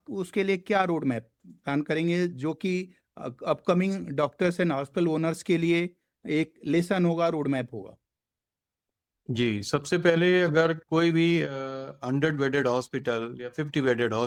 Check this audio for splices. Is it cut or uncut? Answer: uncut